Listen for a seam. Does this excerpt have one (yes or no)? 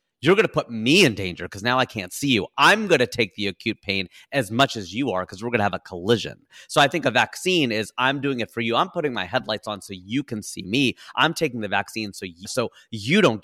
no